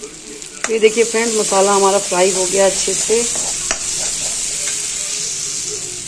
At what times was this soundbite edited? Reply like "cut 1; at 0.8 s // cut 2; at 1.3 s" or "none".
none